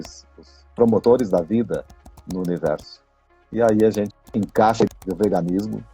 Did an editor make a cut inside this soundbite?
yes; 2 cuts; at 4.2 s, 5.0 s

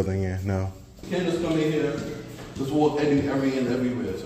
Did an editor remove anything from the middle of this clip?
yes; 1 cut; at 1.0 s

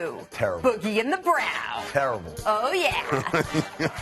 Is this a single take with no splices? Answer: no; 1 cut; at 2.9 s

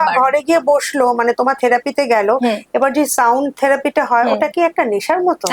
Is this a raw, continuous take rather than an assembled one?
yes; 0 cuts

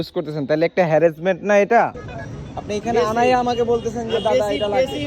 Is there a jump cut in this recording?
yes; 1 cut; at 2.0 s

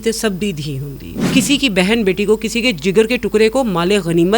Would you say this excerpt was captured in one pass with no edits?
no; 1 cut; at 1.2 s

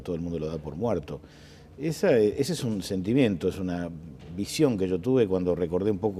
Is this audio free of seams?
yes; 0 cuts

